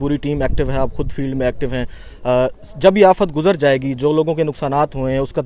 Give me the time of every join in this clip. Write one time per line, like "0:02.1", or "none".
none